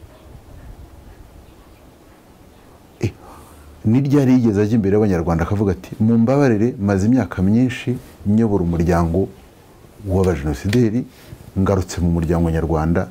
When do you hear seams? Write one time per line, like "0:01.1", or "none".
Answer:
none